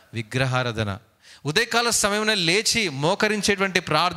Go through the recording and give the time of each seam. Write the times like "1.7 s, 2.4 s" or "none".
1.1 s